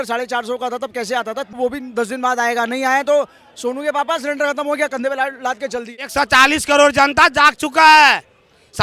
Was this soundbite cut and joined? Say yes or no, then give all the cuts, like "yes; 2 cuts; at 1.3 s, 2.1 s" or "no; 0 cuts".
yes; 2 cuts; at 1.6 s, 6.1 s